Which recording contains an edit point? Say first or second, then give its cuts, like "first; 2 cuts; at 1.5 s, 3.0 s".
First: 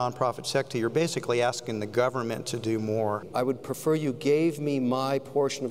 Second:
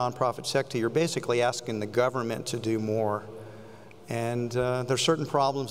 first; 1 cut; at 3.3 s